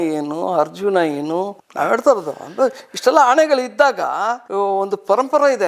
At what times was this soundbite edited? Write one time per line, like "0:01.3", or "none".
0:01.7
0:04.4